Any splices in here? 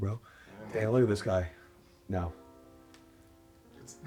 no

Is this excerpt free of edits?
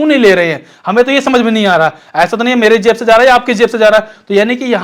yes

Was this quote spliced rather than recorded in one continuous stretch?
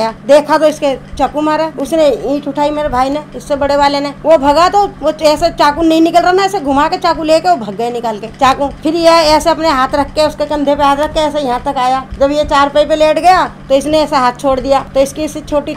no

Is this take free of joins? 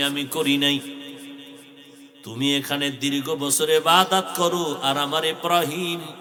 yes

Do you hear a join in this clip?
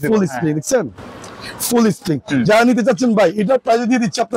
no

